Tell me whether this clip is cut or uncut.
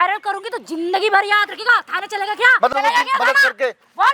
cut